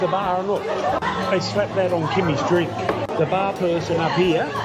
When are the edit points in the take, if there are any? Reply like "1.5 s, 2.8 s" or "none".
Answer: 1.0 s